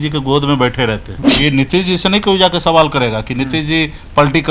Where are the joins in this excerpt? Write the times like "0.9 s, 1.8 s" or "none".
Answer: 1.1 s